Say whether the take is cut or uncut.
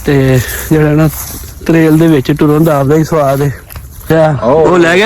cut